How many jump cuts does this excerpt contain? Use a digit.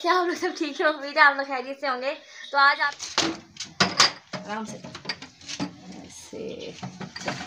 1